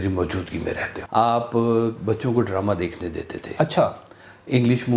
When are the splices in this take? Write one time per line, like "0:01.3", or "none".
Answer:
0:00.9